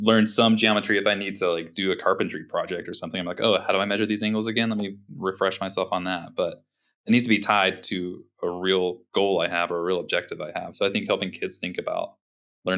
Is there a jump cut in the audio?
no; 0 cuts

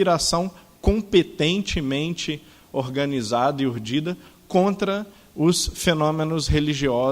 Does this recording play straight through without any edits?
yes; 0 cuts

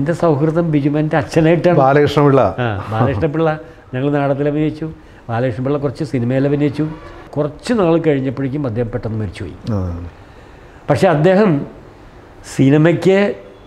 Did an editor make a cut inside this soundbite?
yes; 1 cut; at 7.2 s

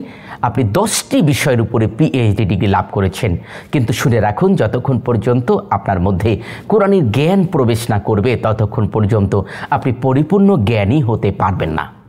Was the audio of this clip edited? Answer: no; 0 cuts

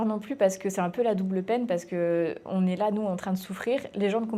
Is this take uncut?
yes; 0 cuts

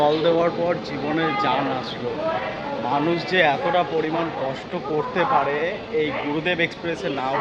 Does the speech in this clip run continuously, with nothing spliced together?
yes; 0 cuts

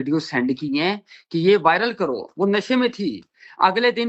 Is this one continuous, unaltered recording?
yes; 0 cuts

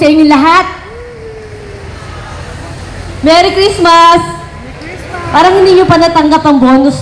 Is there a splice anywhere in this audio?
no; 0 cuts

